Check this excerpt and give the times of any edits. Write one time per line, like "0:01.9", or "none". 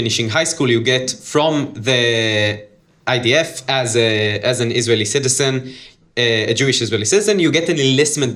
none